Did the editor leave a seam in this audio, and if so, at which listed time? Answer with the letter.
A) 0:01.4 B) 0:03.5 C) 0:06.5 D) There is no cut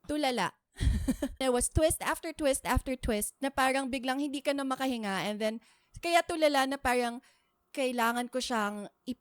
A